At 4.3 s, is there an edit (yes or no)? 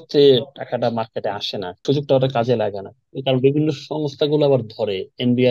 no